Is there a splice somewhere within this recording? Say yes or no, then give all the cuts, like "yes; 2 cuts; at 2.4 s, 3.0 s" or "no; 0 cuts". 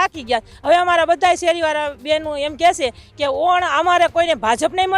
no; 0 cuts